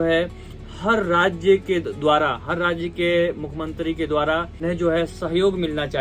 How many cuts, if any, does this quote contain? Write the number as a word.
one